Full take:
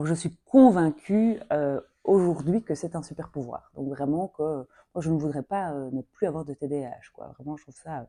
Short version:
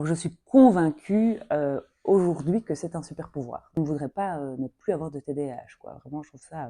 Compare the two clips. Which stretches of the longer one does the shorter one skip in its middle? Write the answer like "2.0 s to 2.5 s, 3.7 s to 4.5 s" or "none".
3.8 s to 5.1 s